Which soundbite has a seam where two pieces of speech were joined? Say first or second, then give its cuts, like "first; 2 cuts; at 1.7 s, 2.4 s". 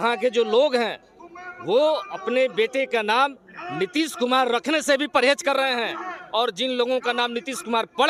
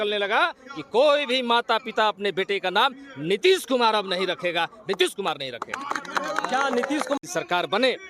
second; 1 cut; at 7.2 s